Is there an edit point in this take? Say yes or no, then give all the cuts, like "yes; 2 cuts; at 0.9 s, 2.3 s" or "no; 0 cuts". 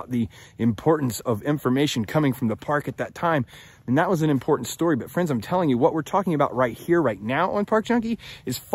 yes; 1 cut; at 1.2 s